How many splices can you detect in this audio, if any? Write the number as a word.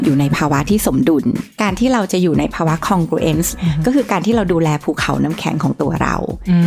two